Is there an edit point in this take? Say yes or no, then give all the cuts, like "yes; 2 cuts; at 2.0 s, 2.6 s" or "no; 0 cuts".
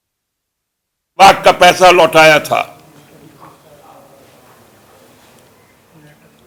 no; 0 cuts